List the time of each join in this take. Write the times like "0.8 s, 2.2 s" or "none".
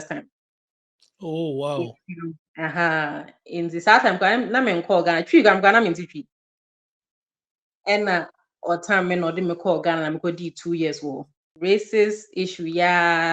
11.4 s

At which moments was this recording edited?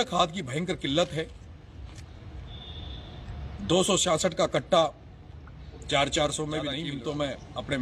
6.9 s

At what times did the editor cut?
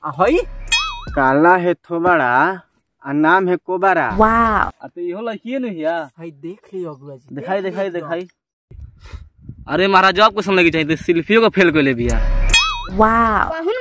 12.8 s

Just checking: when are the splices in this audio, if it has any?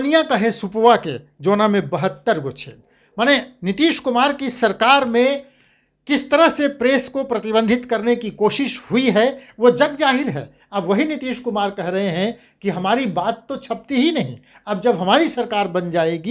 none

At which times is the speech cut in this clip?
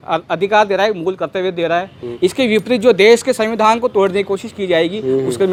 none

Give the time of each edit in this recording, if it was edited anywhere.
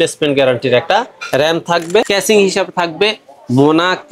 2.1 s

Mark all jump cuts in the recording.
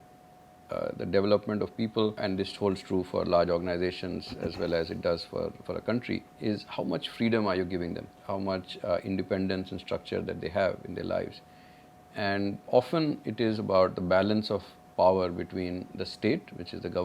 2.2 s, 6.3 s, 8.1 s, 12.7 s

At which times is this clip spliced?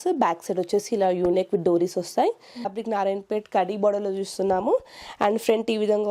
2.8 s

